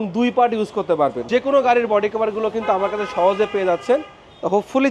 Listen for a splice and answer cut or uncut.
cut